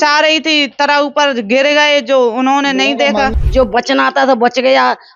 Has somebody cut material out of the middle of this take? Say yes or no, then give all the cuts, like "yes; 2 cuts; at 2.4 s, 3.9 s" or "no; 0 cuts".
yes; 1 cut; at 3.3 s